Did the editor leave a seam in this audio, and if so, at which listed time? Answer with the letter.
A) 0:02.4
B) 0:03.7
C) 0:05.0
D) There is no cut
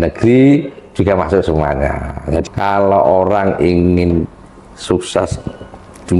A